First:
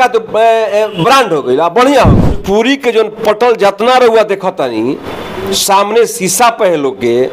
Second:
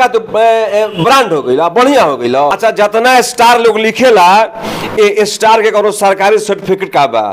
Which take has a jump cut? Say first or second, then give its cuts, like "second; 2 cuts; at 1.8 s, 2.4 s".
first; 1 cut; at 2.3 s